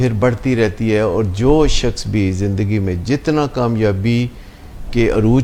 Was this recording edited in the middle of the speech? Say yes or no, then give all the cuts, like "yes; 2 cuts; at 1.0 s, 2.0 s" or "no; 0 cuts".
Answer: no; 0 cuts